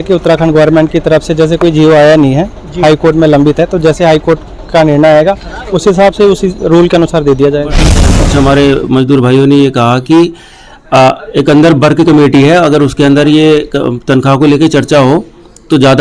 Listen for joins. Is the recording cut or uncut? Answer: cut